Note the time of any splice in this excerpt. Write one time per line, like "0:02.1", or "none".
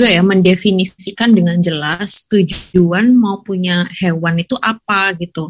0:01.0
0:02.6